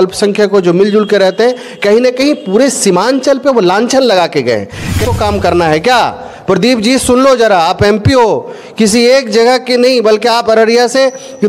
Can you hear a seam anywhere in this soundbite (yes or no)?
yes